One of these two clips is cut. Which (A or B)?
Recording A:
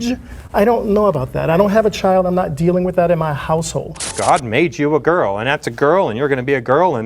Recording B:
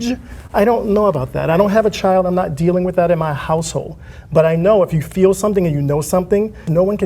A